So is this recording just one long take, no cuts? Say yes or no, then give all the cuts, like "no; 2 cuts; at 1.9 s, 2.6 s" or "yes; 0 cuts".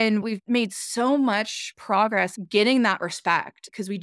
no; 1 cut; at 1.9 s